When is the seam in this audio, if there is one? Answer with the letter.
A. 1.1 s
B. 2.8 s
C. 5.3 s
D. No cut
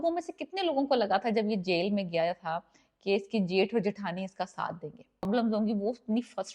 C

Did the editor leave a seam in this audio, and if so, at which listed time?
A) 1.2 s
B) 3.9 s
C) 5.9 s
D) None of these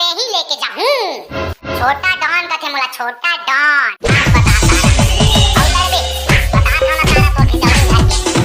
B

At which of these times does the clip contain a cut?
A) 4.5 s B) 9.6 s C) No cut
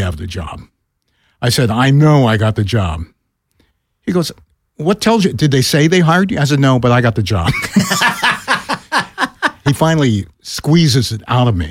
B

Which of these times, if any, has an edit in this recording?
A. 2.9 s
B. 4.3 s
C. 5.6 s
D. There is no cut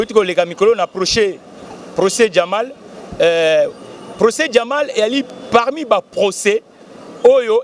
D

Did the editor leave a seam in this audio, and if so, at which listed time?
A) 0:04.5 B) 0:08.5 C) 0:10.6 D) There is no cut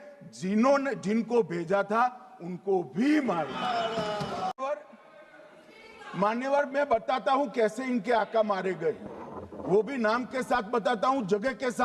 A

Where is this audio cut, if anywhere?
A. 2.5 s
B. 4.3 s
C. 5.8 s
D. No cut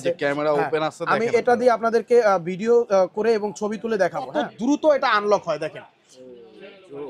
B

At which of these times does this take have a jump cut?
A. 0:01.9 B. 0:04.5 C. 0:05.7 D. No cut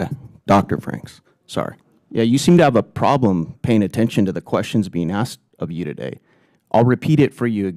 A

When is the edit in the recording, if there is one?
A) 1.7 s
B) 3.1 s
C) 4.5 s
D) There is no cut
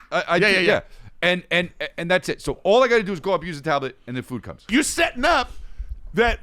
C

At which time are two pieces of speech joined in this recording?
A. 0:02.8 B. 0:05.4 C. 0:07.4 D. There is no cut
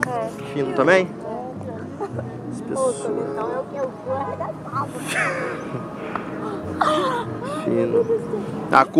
C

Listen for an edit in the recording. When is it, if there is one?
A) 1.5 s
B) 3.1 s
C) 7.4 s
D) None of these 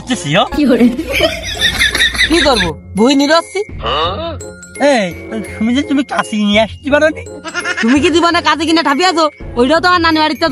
D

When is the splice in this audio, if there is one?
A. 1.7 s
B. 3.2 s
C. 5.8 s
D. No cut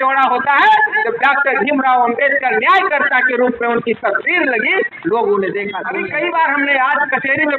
C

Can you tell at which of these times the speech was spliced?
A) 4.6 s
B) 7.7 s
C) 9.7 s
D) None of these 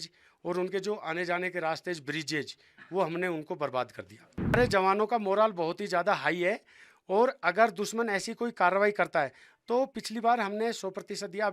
A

